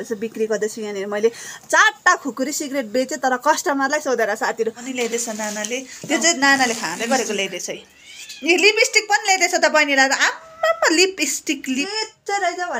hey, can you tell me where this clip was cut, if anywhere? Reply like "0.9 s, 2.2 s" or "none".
4.8 s, 11.9 s